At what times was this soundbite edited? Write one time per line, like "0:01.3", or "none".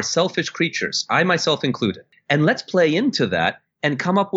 0:02.0